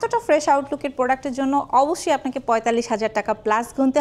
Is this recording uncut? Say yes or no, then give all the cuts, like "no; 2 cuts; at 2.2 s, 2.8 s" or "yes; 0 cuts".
yes; 0 cuts